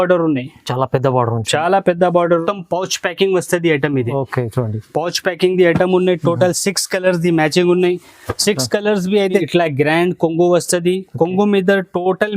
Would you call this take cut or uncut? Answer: cut